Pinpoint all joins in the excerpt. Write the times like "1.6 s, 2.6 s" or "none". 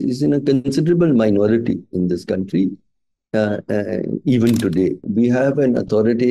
5.0 s